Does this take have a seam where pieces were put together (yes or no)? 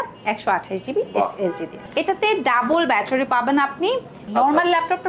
yes